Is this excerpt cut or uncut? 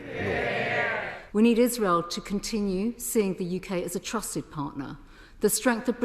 cut